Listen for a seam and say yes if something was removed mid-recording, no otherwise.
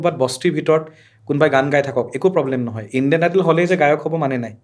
no